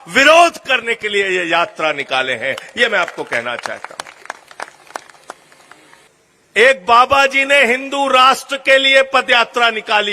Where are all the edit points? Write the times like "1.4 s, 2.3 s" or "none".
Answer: 6.0 s